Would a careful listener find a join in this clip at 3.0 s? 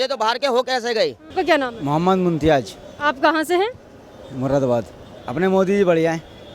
no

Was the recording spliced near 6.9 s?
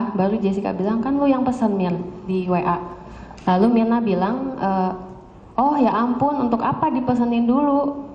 yes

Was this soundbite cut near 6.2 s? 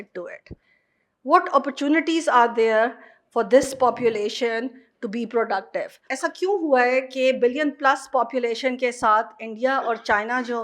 yes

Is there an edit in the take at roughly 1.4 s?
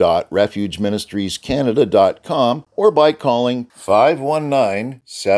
no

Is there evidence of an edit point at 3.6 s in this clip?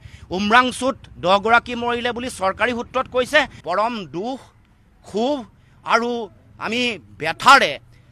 yes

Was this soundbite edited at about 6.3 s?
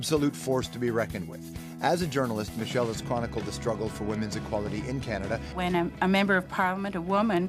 no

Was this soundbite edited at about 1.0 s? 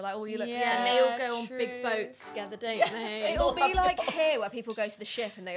no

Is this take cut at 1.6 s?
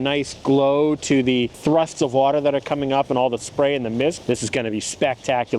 yes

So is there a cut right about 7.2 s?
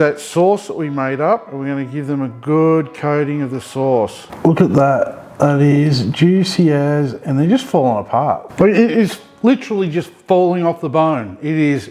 no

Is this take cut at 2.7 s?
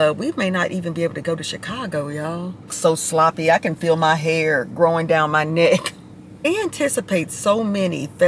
yes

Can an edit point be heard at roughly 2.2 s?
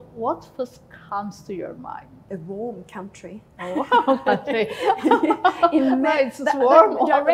yes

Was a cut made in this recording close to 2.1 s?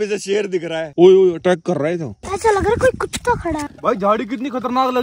no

